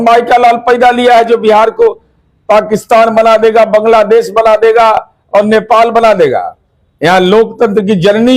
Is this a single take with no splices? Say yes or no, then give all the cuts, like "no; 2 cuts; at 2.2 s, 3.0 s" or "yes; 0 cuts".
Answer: yes; 0 cuts